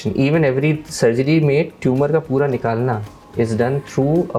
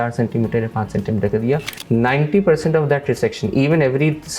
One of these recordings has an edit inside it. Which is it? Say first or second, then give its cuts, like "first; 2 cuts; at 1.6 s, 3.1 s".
second; 1 cut; at 1.8 s